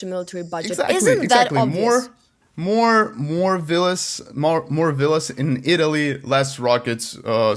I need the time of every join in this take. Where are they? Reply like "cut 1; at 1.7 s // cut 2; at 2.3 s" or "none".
none